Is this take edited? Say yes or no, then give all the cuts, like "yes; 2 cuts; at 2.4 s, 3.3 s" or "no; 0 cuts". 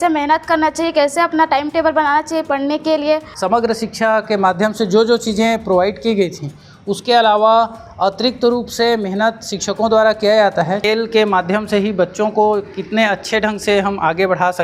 yes; 2 cuts; at 3.3 s, 10.8 s